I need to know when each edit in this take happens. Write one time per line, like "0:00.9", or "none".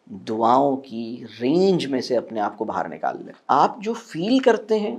0:03.3

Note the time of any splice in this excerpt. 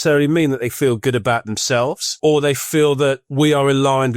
0:02.1
0:03.2

